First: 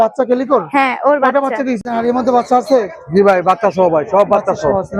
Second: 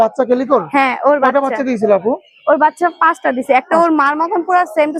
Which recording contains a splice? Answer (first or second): first